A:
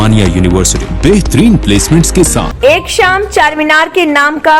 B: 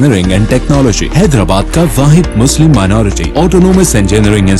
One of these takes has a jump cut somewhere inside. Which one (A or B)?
A